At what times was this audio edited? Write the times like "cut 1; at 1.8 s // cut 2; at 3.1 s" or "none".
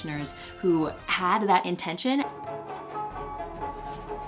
cut 1; at 2.4 s